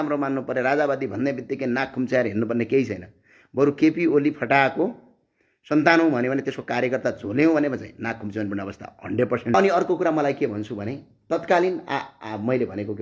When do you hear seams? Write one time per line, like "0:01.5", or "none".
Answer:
0:09.5